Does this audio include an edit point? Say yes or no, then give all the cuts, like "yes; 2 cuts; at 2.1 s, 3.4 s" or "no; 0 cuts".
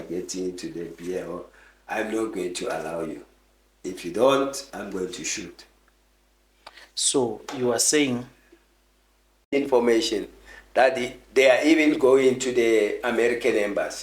yes; 1 cut; at 9.5 s